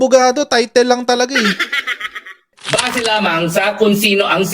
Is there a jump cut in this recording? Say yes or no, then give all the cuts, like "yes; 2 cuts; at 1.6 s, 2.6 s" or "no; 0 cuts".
no; 0 cuts